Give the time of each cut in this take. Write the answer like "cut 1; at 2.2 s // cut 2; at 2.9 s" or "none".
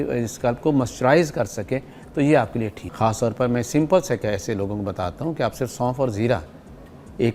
cut 1; at 2.8 s